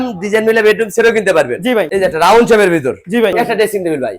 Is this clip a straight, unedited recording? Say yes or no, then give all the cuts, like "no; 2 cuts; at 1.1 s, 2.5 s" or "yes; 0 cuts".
no; 2 cuts; at 1.9 s, 3.3 s